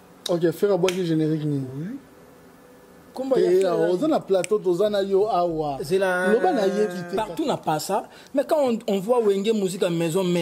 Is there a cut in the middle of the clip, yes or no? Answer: yes